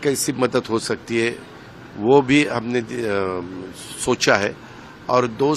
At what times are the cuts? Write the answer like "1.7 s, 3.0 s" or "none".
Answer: none